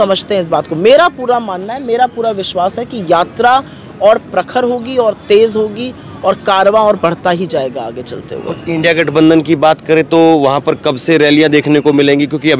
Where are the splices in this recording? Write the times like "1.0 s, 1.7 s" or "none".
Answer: none